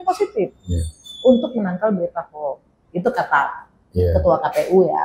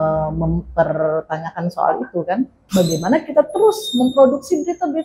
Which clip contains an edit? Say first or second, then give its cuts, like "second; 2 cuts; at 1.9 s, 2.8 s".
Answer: second; 1 cut; at 2.6 s